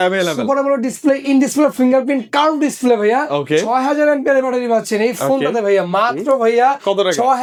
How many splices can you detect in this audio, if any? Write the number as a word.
zero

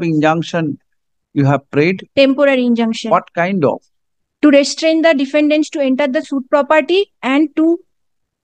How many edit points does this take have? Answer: zero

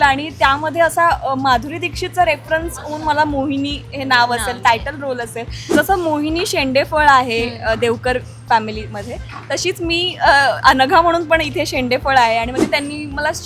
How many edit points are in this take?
two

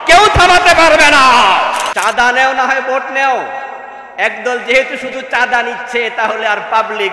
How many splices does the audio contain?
one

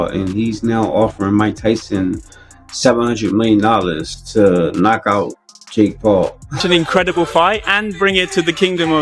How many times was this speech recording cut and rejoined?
one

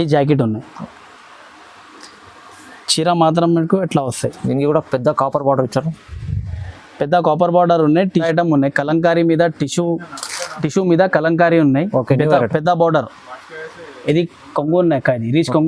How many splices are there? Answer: one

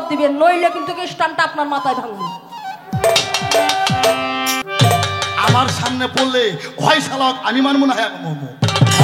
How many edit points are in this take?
one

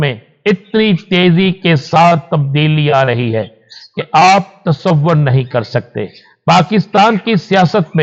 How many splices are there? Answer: zero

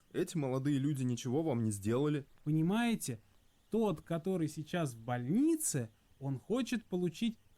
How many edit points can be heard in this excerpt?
one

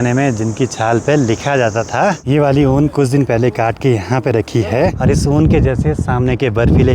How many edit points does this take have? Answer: two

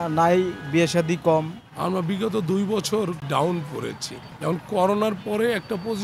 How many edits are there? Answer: one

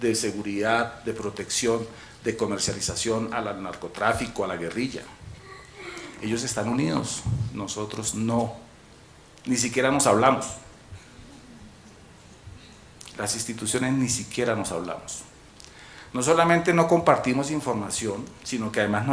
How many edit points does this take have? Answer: zero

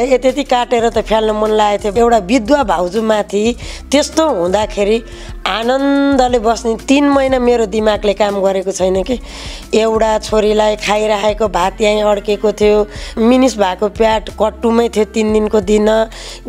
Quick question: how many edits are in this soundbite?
three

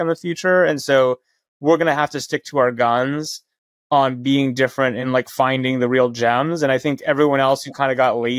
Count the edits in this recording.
one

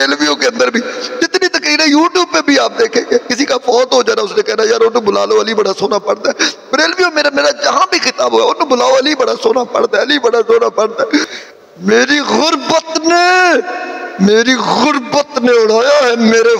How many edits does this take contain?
one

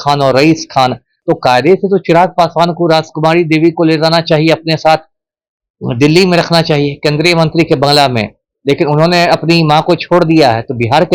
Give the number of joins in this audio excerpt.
one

